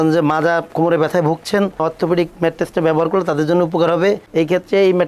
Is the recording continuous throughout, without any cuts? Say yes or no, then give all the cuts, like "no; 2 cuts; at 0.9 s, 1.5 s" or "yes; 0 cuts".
yes; 0 cuts